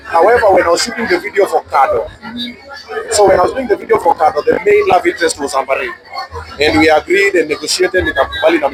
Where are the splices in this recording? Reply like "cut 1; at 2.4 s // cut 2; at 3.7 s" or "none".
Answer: none